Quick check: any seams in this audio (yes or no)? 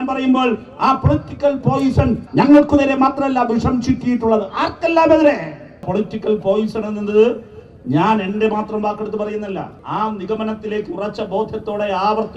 yes